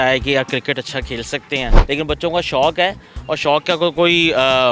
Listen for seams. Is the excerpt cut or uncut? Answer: cut